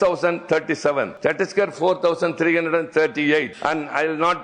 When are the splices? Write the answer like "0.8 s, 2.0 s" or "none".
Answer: 1.1 s, 3.5 s